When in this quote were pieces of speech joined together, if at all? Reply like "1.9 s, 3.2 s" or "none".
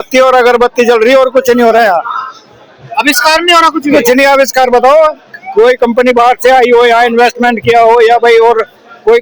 none